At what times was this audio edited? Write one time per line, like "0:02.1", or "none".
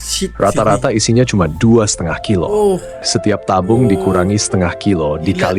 0:03.0